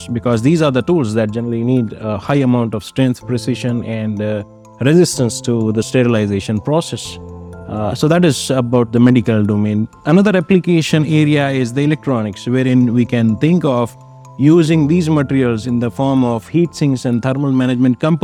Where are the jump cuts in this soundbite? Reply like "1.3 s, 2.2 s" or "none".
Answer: none